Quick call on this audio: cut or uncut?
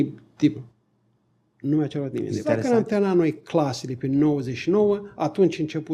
cut